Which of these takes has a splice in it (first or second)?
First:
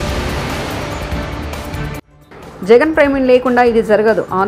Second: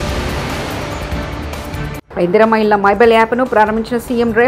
first